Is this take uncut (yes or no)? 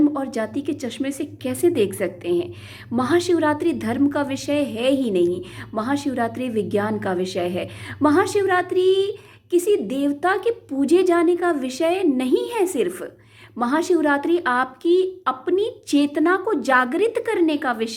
yes